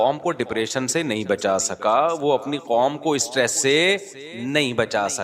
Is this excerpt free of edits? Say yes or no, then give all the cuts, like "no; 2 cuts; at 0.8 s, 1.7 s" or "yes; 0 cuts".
yes; 0 cuts